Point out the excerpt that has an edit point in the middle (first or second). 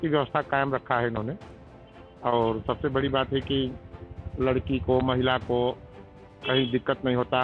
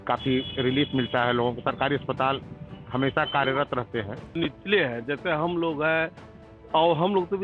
second